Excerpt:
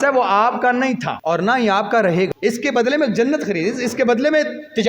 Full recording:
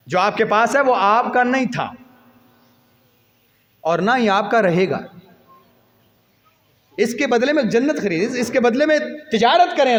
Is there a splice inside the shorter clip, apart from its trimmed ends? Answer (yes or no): yes